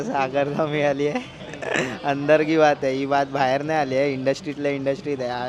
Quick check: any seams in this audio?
no; 0 cuts

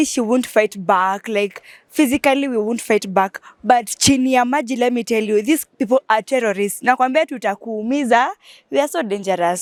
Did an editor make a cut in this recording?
no; 0 cuts

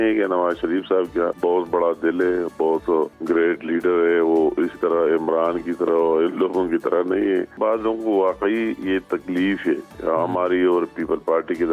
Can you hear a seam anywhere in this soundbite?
yes; 3 cuts; at 1.4 s, 3.2 s, 7.5 s

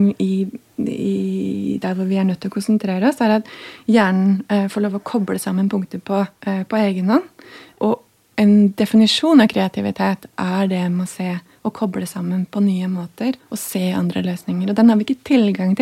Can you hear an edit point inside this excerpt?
yes; 3 cuts; at 6.4 s, 7.6 s, 13.5 s

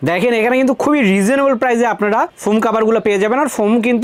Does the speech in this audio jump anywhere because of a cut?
no; 0 cuts

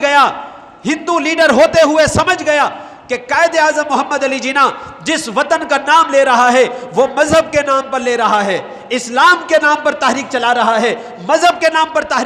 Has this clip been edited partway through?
no; 0 cuts

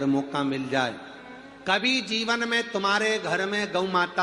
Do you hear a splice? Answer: yes; 1 cut; at 2.2 s

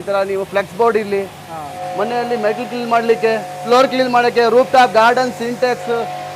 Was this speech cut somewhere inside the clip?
yes; 2 cuts; at 1.8 s, 3.5 s

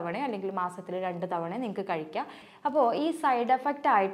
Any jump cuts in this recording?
yes; 1 cut; at 2.4 s

